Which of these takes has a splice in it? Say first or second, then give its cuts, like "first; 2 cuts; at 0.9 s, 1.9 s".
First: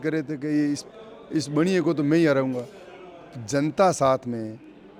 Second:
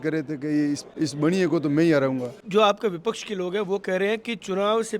second; 2 cuts; at 0.9 s, 2.4 s